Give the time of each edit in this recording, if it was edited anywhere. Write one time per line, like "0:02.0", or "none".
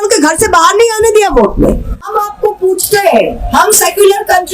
0:02.0